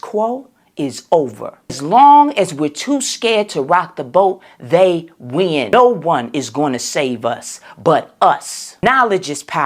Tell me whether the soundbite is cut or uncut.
cut